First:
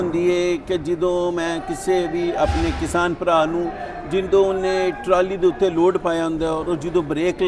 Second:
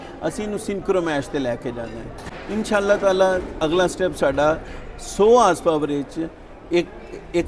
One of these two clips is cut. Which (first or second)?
second